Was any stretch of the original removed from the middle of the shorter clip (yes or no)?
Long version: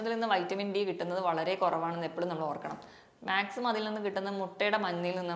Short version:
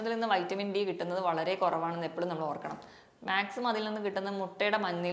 no